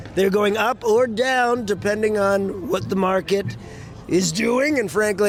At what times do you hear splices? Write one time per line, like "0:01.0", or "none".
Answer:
none